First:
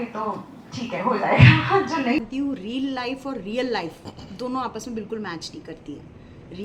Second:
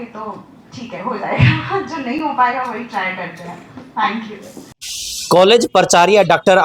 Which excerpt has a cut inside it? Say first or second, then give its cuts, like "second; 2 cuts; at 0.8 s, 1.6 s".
first; 1 cut; at 2.2 s